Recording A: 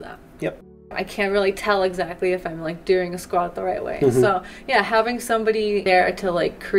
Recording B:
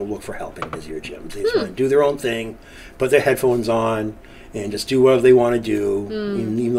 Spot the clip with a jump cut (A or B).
A